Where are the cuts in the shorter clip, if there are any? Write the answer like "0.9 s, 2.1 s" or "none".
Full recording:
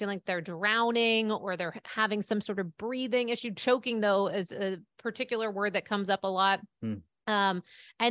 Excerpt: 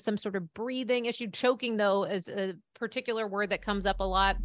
none